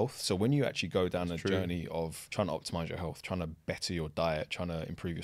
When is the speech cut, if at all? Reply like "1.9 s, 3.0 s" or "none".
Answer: 2.2 s

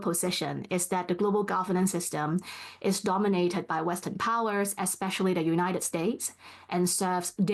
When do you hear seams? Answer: none

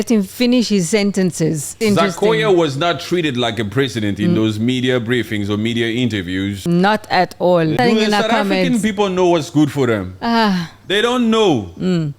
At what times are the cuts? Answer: 1.8 s, 6.6 s, 7.8 s

